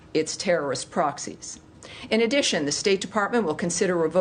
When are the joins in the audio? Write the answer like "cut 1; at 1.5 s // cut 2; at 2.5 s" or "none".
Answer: none